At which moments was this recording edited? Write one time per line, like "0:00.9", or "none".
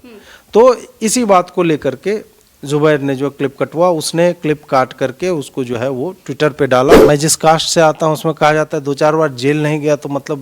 0:06.9